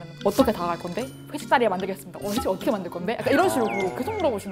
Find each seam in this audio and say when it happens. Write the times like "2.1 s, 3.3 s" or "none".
none